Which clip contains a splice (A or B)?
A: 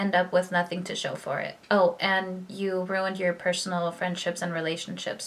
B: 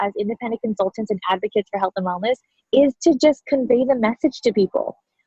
A